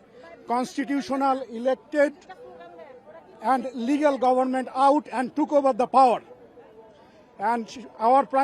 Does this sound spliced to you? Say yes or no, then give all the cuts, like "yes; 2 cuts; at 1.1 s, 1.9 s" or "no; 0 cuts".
no; 0 cuts